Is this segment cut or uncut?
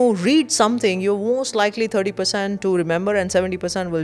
uncut